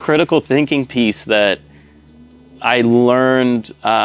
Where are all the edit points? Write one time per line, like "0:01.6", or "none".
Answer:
none